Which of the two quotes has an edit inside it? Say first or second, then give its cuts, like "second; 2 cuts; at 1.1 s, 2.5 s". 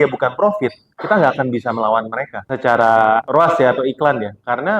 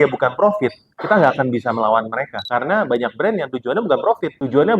second; 1 cut; at 2.4 s